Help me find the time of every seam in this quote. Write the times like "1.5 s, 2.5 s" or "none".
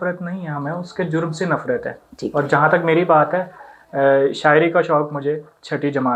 none

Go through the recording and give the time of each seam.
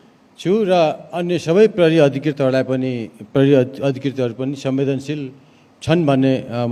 none

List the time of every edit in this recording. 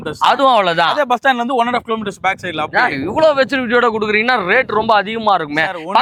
none

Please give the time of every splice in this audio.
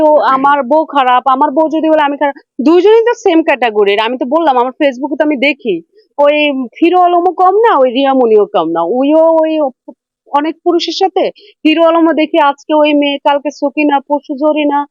none

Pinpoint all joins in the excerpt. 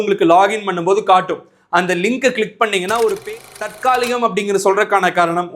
3.2 s

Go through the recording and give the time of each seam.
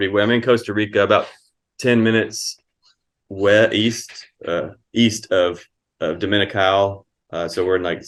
none

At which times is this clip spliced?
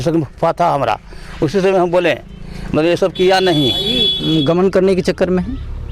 4.1 s

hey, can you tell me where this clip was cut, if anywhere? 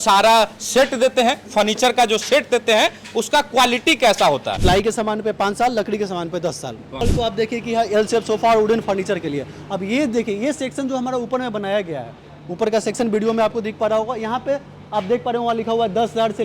4.5 s, 6.8 s

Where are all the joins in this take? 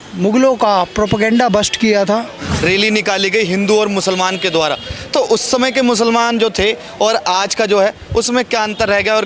2.4 s

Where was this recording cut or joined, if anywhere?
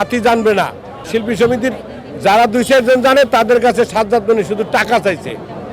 1.1 s

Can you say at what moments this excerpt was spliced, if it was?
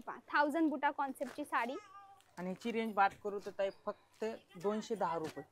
none

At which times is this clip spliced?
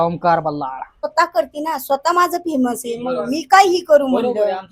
1.1 s

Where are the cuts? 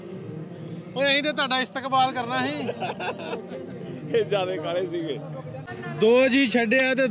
5.7 s

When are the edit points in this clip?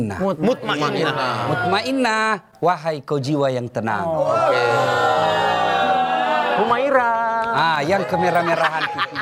none

